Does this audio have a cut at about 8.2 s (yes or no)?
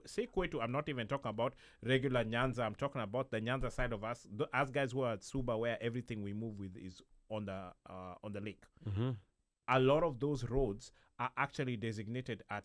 no